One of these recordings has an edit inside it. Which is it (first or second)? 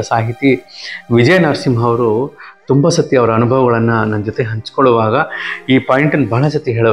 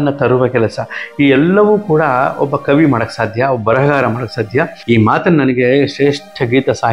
second